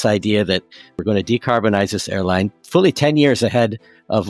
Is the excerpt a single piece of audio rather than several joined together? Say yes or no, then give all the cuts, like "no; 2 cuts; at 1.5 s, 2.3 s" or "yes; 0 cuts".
no; 1 cut; at 1.0 s